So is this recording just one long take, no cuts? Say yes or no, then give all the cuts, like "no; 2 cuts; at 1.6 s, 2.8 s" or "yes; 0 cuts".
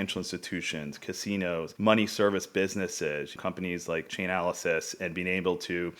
no; 1 cut; at 1.7 s